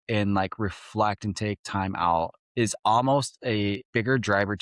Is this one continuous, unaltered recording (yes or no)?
no